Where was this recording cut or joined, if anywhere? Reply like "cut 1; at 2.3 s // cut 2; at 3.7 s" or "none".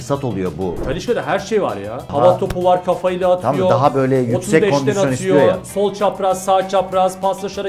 cut 1; at 0.8 s // cut 2; at 2.0 s